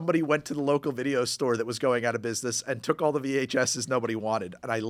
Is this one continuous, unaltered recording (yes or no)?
yes